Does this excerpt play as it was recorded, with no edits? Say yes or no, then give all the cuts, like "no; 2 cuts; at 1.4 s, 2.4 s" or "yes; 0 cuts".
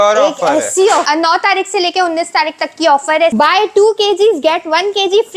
no; 2 cuts; at 1.1 s, 3.3 s